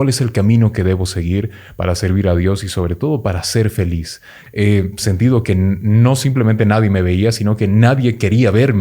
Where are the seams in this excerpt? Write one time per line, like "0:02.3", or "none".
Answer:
0:04.4